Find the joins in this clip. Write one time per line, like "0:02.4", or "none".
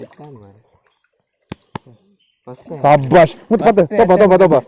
none